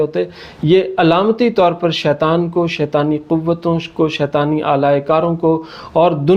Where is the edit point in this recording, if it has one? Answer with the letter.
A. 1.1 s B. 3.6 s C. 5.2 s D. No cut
D